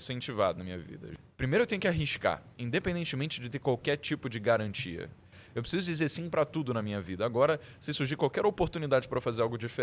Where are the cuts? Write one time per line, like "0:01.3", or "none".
0:01.0
0:05.4